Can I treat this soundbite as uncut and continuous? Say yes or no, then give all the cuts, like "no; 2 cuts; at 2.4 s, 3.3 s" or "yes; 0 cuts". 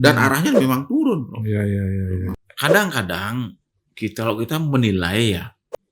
no; 1 cut; at 2.4 s